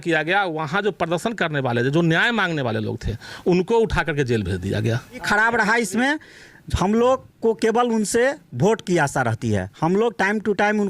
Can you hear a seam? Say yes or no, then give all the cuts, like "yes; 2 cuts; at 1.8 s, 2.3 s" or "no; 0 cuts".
yes; 1 cut; at 5.2 s